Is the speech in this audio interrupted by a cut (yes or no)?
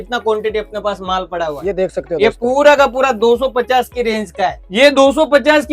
yes